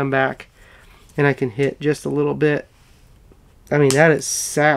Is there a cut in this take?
no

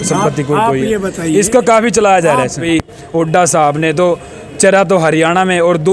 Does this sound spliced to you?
yes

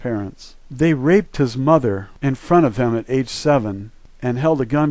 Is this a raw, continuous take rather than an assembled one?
no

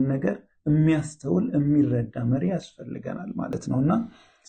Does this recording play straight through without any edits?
no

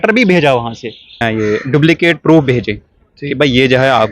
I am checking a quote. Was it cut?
yes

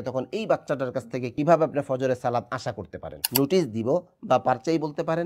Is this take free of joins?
no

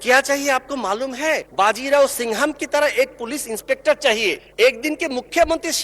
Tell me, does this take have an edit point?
yes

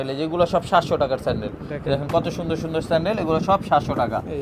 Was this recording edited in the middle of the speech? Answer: no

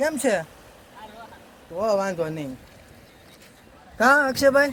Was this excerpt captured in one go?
yes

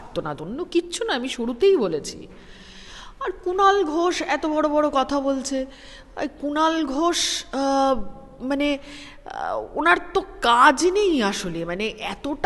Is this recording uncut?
yes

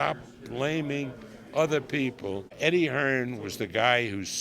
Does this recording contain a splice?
yes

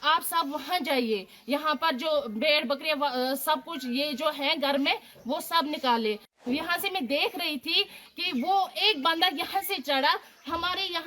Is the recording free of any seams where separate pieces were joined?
no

